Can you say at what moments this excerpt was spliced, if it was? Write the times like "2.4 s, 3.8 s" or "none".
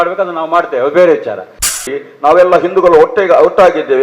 1.8 s